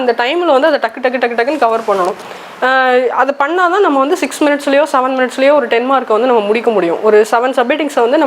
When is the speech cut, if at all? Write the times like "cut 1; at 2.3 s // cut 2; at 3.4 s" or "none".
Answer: none